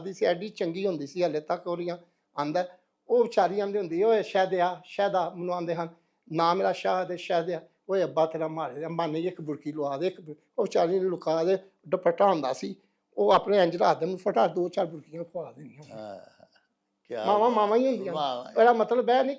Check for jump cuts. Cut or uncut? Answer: uncut